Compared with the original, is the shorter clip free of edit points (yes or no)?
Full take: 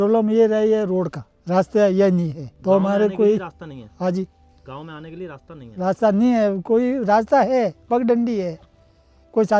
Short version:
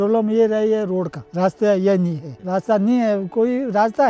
no